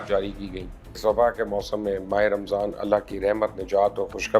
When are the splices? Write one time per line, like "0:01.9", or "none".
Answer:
0:01.0